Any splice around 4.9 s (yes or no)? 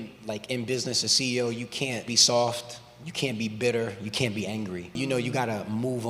yes